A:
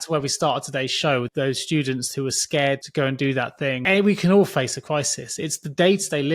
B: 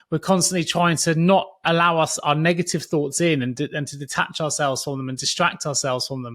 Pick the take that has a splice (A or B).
A